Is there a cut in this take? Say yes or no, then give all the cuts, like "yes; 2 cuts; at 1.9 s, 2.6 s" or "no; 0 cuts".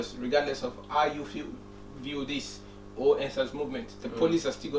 no; 0 cuts